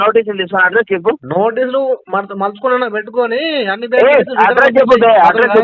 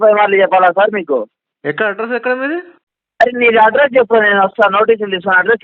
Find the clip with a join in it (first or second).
second